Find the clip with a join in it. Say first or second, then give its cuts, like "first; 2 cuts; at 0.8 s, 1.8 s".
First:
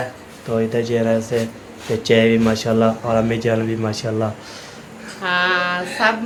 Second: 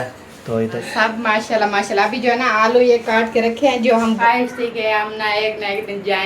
second; 2 cuts; at 0.8 s, 4.2 s